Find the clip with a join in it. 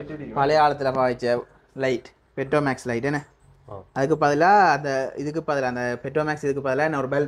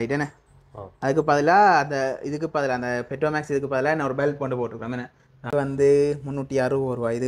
second; 1 cut; at 5.5 s

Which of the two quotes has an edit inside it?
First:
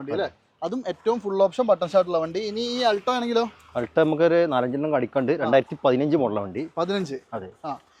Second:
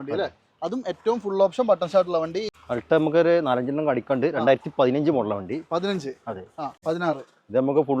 second; 2 cuts; at 2.5 s, 6.7 s

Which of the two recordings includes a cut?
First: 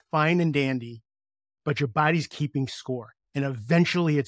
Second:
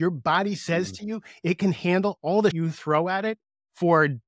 second; 1 cut; at 2.6 s

